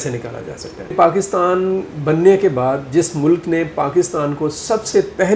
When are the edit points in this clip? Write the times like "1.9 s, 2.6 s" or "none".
0.9 s